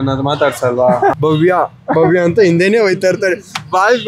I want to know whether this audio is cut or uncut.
cut